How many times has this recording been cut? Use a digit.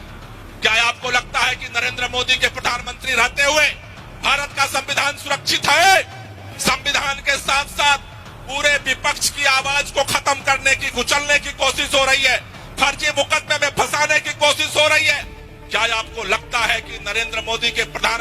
1